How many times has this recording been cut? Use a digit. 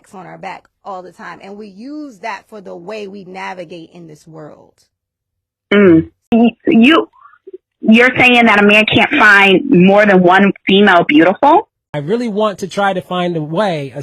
2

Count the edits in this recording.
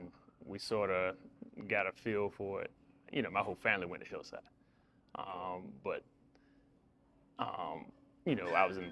0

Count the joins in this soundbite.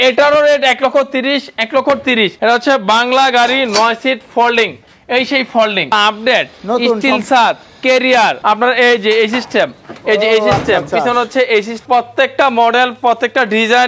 4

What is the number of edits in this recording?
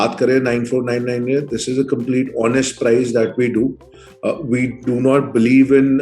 0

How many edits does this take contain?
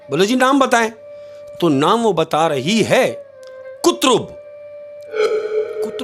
0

